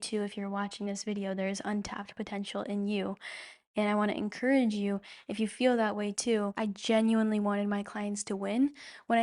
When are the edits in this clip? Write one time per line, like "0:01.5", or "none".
0:06.5